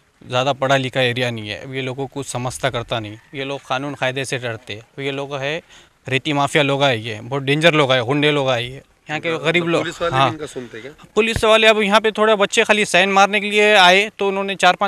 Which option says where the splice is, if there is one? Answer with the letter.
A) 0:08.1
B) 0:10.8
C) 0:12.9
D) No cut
D